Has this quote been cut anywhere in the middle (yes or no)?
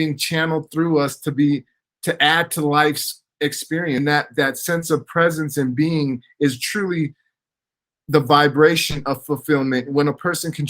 yes